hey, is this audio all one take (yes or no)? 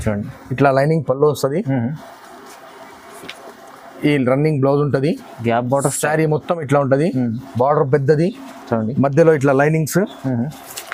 yes